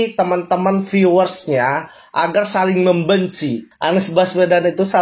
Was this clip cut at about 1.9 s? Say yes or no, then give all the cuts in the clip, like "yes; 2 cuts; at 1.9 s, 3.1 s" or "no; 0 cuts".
no; 1 cut; at 3.7 s